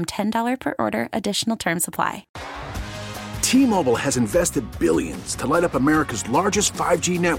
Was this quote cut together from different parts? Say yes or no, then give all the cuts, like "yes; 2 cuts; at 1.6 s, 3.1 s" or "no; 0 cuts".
yes; 1 cut; at 2.3 s